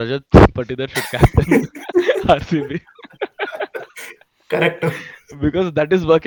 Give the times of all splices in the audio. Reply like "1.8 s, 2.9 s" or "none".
none